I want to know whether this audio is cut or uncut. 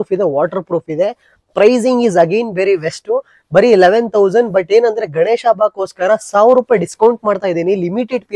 uncut